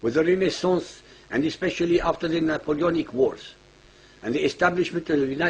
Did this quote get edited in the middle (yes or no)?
yes